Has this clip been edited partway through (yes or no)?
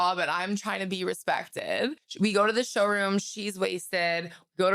yes